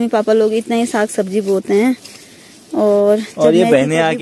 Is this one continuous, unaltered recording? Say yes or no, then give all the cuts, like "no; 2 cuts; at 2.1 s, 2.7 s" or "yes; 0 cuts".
yes; 0 cuts